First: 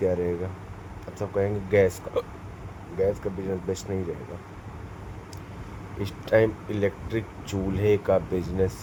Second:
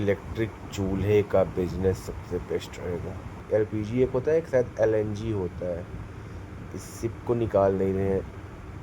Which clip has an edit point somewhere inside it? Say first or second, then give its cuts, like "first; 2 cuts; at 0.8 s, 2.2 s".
second; 1 cut; at 3.4 s